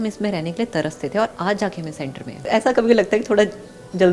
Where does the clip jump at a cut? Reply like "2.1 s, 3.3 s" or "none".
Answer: 2.4 s